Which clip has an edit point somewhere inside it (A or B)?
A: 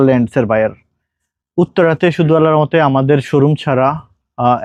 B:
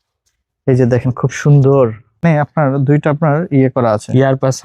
B